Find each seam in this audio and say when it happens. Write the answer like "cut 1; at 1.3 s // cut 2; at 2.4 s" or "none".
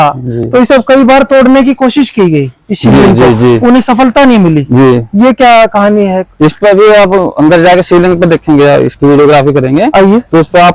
none